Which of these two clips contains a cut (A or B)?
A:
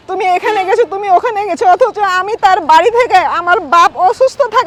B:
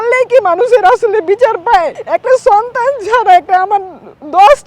B